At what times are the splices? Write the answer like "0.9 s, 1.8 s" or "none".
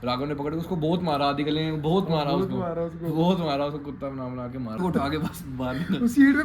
4.8 s